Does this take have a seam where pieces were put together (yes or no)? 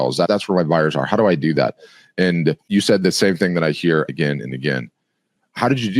yes